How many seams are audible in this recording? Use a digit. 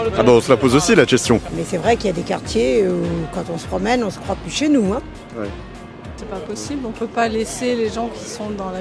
2